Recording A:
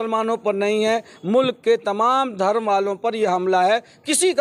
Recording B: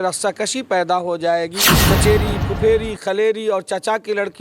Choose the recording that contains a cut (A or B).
B